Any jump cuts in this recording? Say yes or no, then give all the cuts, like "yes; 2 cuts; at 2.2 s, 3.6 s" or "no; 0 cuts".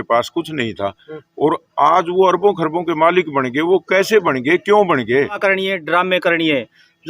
yes; 1 cut; at 5.4 s